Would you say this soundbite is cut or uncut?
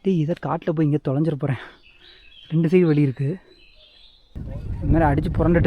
cut